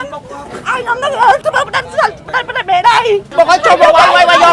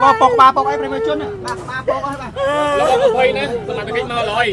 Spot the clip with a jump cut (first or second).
first